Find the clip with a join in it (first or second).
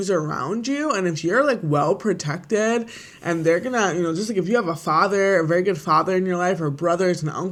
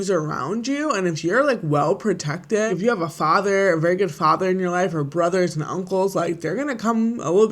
second